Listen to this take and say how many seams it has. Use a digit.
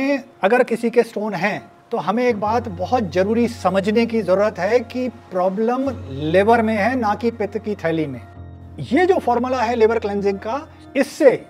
1